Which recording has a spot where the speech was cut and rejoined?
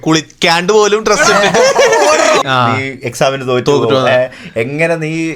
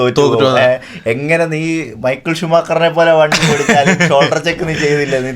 first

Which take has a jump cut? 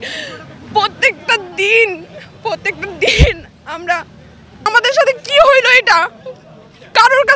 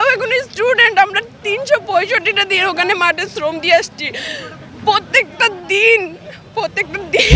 first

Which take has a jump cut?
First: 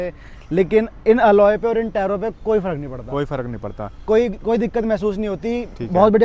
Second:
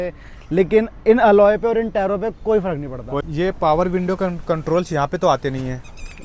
second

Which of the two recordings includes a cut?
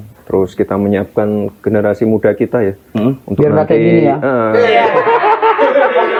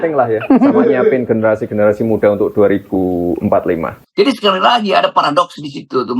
second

